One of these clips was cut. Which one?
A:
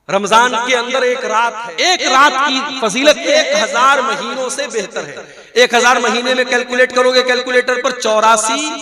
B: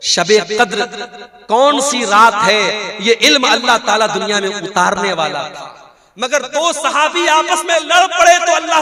A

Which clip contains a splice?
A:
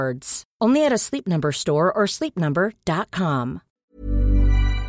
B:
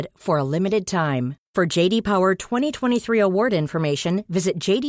A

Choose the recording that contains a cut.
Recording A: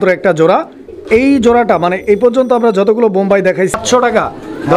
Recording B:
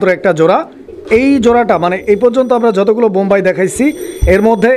A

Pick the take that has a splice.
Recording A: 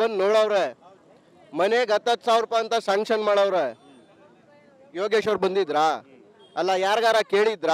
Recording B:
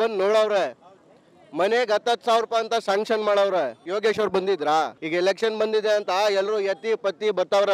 B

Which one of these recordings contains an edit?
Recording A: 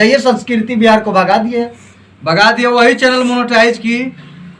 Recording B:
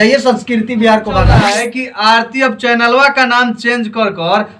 B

